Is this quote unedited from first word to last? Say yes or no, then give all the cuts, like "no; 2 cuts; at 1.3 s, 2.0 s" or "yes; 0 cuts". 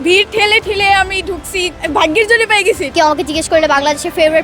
no; 2 cuts; at 1.8 s, 2.9 s